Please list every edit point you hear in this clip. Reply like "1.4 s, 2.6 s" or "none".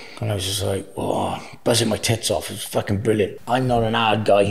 3.4 s

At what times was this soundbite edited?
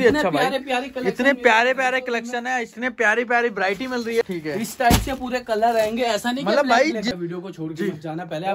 4.2 s, 7.1 s

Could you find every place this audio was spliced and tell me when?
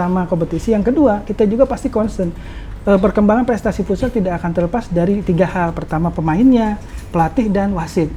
none

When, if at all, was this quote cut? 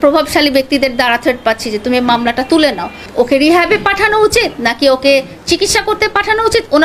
3.1 s

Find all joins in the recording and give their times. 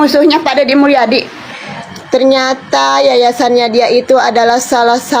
1.4 s

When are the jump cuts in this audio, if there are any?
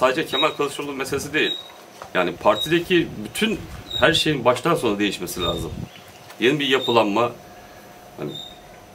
none

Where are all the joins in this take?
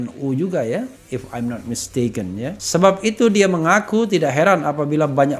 2.6 s

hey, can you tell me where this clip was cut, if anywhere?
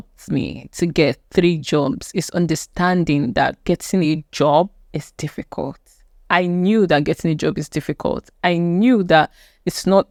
none

